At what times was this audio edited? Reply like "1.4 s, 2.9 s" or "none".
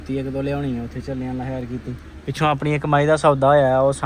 none